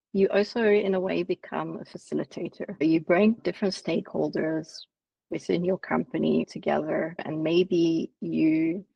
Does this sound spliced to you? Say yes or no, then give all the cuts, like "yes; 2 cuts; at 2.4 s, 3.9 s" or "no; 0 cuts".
no; 0 cuts